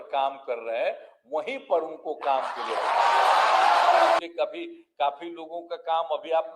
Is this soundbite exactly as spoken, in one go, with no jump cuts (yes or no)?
no